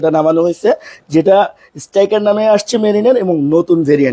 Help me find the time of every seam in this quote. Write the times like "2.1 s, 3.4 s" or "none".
none